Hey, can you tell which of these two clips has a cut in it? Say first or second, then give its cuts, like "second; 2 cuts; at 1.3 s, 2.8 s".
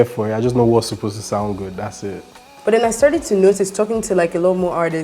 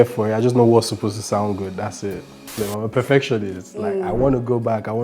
second; 1 cut; at 2.6 s